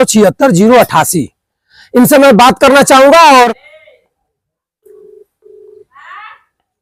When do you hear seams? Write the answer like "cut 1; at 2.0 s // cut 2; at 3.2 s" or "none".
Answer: none